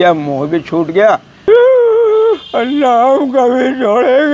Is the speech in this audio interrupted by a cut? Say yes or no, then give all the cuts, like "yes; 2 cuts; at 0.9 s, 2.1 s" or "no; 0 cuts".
yes; 1 cut; at 1.3 s